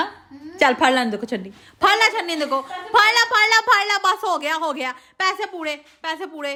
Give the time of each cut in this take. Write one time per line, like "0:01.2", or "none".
none